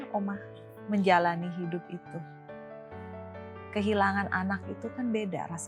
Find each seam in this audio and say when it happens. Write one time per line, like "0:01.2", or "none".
0:02.2
0:03.7